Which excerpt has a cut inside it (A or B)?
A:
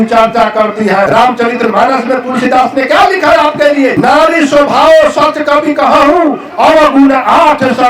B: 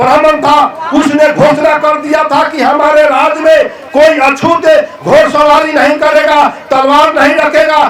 A